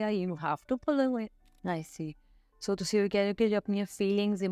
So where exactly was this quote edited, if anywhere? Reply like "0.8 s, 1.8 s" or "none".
1.5 s